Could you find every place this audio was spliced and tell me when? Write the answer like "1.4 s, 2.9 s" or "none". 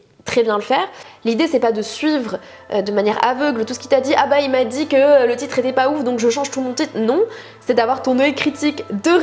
1.1 s